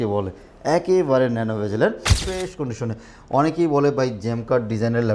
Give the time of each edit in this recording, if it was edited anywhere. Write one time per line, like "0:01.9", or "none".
0:02.1